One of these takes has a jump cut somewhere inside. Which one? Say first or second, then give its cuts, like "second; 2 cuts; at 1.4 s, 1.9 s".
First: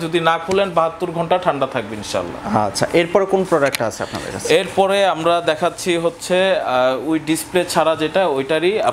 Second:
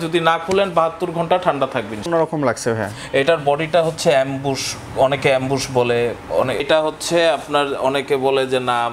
second; 2 cuts; at 2.1 s, 6.6 s